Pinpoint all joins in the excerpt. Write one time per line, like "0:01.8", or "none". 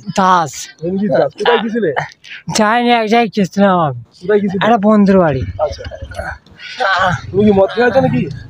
none